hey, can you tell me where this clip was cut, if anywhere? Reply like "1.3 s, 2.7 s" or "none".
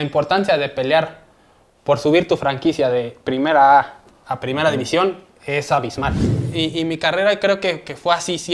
6.3 s